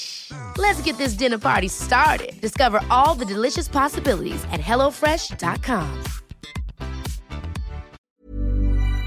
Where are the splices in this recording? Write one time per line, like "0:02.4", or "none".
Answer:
0:08.0